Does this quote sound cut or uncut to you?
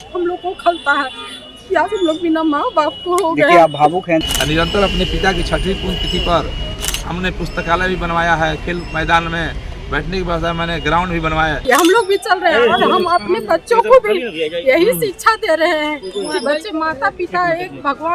cut